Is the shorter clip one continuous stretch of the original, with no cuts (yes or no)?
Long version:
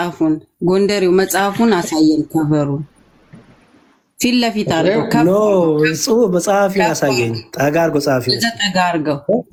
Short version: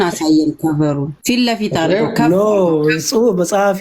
no